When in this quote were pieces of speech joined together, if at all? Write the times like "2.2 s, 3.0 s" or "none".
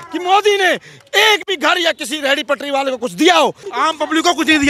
3.6 s